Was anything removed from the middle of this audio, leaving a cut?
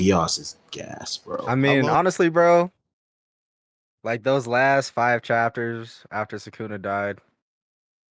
yes; 1 cut; at 1.6 s

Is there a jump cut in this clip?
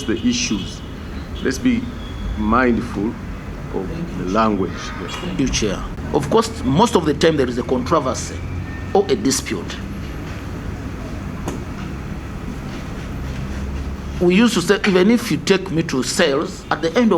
yes; 1 cut; at 5.9 s

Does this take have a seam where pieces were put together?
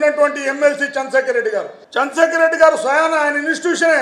yes; 1 cut; at 1.8 s

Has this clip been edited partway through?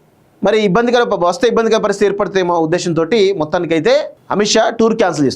yes; 1 cut; at 4.2 s

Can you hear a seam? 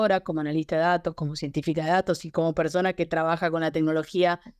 no; 0 cuts

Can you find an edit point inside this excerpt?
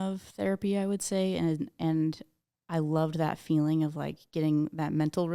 no; 0 cuts

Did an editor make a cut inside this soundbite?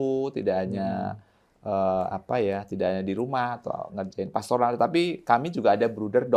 no; 0 cuts

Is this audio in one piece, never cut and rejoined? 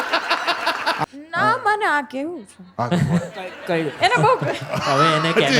no; 1 cut; at 1.0 s

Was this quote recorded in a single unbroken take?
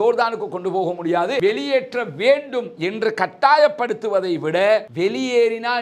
no; 1 cut; at 1.4 s

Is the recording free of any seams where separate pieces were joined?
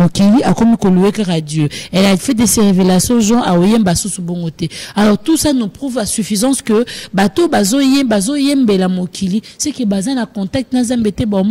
yes; 0 cuts

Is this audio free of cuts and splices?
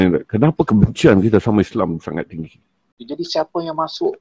no; 1 cut; at 2.9 s

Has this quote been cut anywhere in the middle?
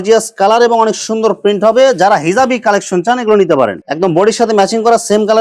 yes; 1 cut; at 3.8 s

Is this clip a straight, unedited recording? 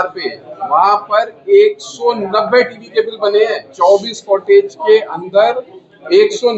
yes; 0 cuts

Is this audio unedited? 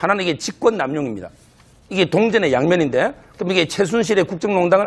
no; 1 cut; at 2.4 s

